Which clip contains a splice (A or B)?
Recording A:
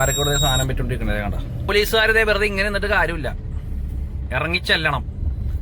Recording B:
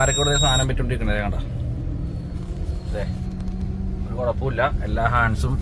A